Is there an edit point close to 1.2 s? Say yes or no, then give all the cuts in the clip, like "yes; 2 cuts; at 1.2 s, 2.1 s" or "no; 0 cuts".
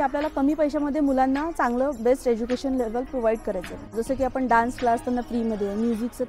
no; 1 cut; at 3.9 s